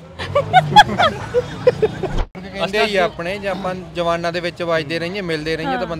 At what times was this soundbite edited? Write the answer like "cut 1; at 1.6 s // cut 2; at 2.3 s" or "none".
cut 1; at 2.3 s